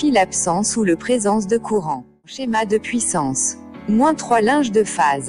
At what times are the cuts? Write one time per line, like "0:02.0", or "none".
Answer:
0:02.4